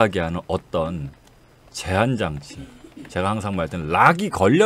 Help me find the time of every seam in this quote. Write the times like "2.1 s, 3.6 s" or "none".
none